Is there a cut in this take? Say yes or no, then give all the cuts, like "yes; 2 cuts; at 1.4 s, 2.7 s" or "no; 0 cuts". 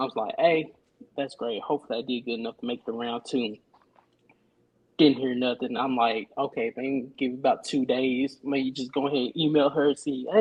no; 0 cuts